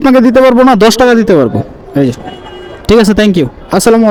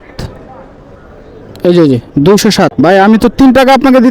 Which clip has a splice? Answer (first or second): second